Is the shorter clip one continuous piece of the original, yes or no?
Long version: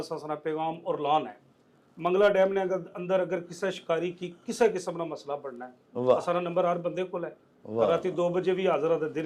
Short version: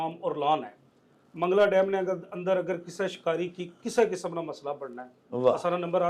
yes